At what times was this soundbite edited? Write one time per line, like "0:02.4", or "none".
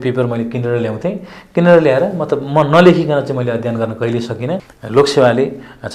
0:04.7